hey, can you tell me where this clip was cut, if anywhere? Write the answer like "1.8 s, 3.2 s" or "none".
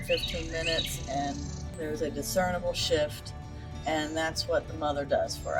1.6 s